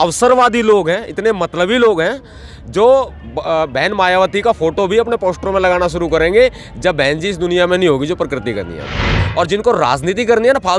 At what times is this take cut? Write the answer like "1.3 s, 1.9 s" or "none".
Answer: 9.2 s